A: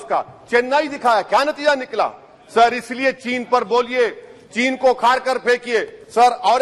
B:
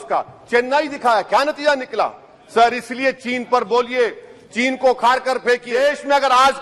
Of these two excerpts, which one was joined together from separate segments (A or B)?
B